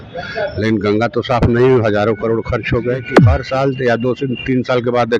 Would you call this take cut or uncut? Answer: cut